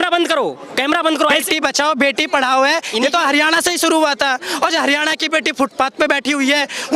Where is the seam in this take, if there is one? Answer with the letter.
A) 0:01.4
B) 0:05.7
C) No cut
A